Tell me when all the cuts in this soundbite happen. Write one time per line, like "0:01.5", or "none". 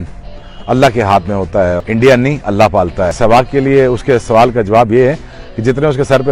0:01.8
0:03.2

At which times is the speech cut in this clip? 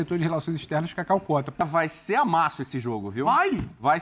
0:01.6

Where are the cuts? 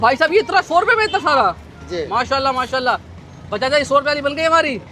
none

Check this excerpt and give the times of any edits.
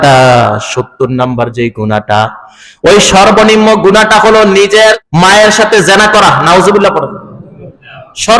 0:05.0

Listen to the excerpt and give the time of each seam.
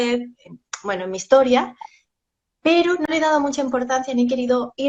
none

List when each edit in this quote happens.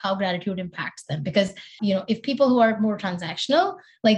0:01.7

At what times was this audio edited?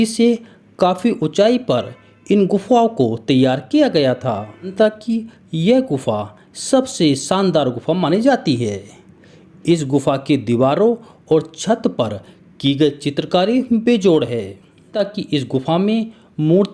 0:04.7
0:14.9

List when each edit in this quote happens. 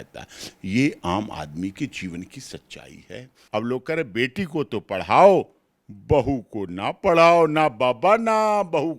0:03.3

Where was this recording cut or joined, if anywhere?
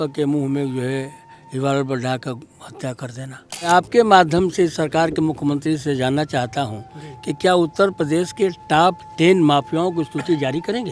0:03.7

